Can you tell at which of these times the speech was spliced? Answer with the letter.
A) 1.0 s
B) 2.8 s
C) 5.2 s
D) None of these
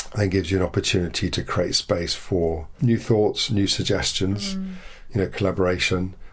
B